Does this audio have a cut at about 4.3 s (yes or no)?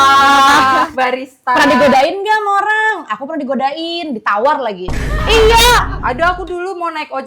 no